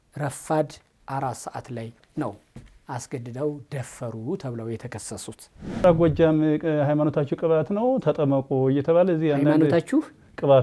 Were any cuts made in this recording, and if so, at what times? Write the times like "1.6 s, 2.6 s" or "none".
5.8 s